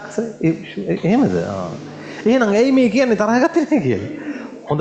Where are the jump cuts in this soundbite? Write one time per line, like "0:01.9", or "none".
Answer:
none